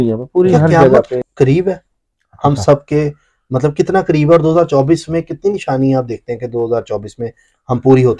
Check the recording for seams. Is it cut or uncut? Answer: cut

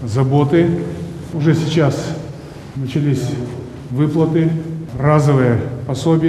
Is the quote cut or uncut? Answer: uncut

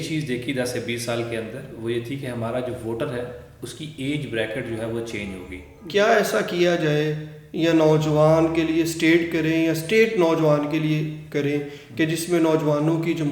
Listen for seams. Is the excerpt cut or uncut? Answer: cut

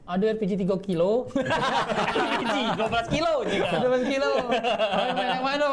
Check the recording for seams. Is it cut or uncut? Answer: uncut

